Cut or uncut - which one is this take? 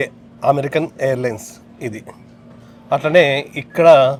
uncut